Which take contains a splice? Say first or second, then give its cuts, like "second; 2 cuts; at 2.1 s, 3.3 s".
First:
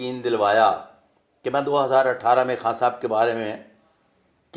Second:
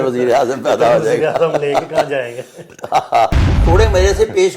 second; 1 cut; at 3.6 s